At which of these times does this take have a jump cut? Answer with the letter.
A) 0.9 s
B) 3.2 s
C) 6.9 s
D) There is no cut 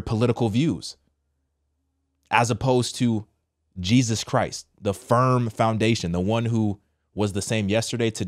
D